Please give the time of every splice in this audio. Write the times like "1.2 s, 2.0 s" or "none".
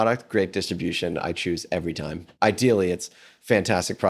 2.3 s